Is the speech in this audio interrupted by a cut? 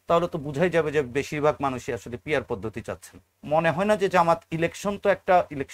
yes; 1 cut; at 3.3 s

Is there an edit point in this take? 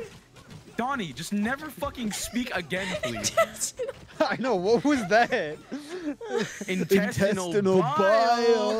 no; 0 cuts

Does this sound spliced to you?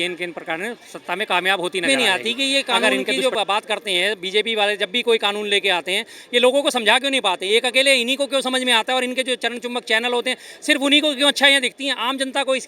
yes; 1 cut; at 1.9 s

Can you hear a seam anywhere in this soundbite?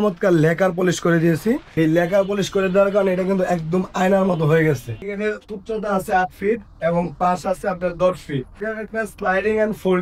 yes; 3 cuts; at 1.7 s, 5.0 s, 8.6 s

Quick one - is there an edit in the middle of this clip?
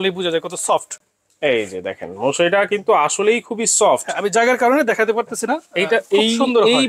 no; 0 cuts

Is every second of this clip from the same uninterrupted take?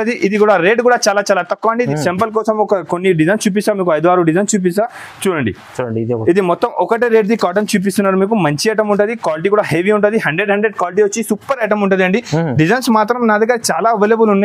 no; 1 cut; at 1.9 s

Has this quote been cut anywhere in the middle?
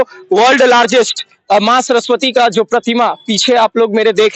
no; 0 cuts

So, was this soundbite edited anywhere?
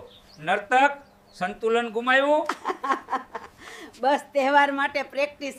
no; 0 cuts

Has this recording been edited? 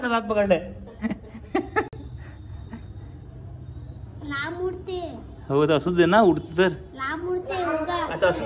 no; 0 cuts

